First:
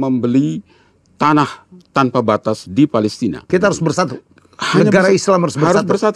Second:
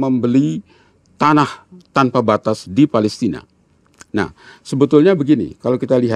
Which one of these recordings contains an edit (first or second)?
first